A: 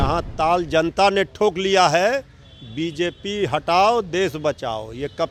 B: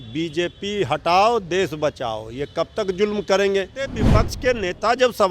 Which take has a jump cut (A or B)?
B